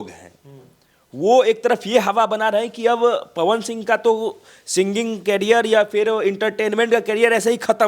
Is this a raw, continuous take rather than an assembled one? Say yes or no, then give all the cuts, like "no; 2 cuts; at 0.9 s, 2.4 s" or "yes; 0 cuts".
yes; 0 cuts